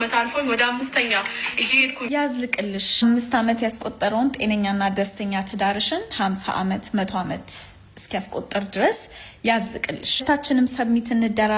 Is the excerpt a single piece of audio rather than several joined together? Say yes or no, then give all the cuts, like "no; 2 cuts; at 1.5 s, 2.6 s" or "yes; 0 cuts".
yes; 0 cuts